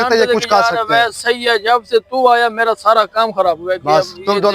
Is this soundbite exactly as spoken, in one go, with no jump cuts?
yes; 0 cuts

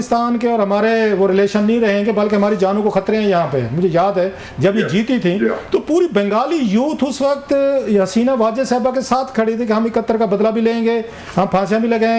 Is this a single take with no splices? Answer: yes; 0 cuts

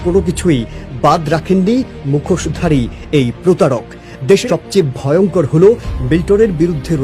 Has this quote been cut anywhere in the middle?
yes; 1 cut; at 4.4 s

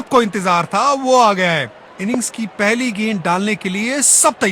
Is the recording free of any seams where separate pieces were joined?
yes; 0 cuts

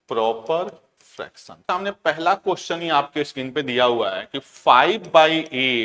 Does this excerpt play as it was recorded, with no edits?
no; 1 cut; at 1.6 s

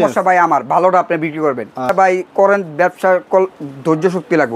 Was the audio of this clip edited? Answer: yes; 1 cut; at 1.9 s

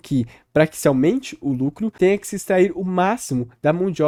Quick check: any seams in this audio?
no; 0 cuts

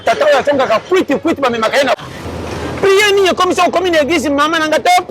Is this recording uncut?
no; 1 cut; at 2.0 s

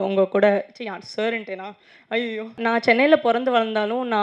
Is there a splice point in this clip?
yes; 1 cut; at 2.6 s

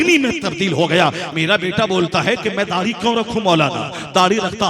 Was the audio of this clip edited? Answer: yes; 1 cut; at 1.2 s

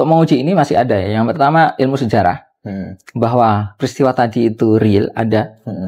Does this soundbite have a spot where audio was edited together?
no; 0 cuts

